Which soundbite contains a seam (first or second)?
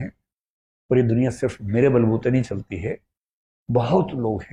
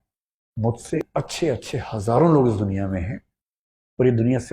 second